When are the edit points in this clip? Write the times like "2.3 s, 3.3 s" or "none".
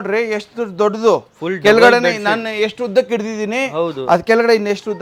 none